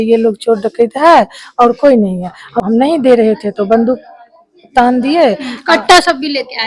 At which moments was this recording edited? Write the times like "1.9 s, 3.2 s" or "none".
2.6 s